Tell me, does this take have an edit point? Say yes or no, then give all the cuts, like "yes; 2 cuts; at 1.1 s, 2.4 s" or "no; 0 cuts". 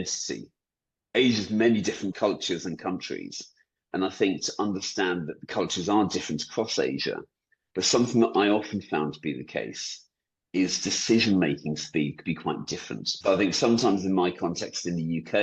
yes; 3 cuts; at 2.1 s, 5.4 s, 13.1 s